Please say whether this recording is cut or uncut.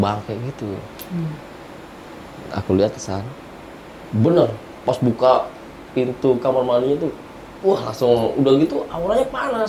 cut